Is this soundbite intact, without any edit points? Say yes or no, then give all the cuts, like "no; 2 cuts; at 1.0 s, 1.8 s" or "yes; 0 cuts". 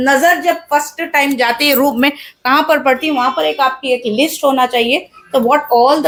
yes; 0 cuts